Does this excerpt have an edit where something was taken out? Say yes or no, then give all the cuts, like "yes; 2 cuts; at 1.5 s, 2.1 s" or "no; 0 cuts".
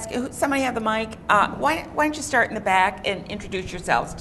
yes; 1 cut; at 2.2 s